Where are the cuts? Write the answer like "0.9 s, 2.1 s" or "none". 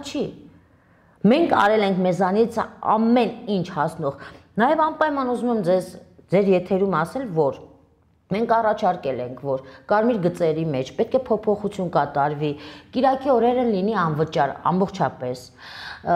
none